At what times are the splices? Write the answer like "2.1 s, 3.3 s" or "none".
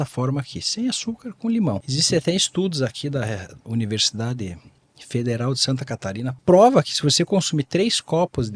1.7 s, 6.3 s